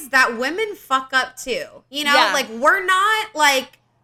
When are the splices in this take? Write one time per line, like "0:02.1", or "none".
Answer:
none